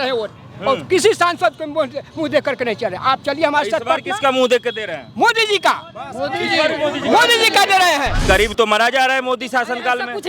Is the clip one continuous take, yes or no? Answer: no